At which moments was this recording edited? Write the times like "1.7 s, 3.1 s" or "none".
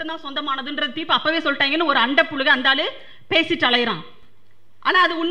none